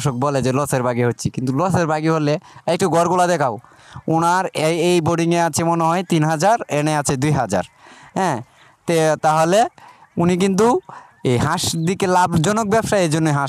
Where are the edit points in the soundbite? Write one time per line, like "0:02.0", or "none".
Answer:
none